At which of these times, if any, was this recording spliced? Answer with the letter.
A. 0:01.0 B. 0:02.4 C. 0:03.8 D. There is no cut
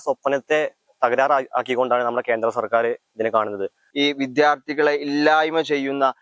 C